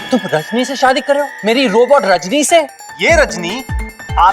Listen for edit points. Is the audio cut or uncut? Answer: cut